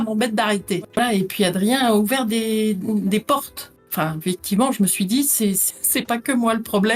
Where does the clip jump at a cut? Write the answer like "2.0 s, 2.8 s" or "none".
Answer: 0.9 s